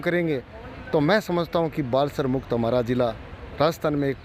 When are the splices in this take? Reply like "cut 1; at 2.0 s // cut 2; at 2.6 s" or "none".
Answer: none